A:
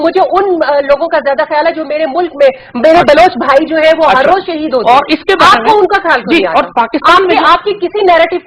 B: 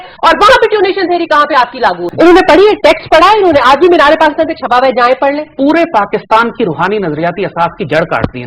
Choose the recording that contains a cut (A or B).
B